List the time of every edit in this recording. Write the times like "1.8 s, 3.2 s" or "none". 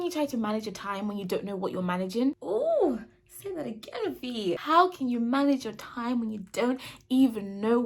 2.4 s, 4.6 s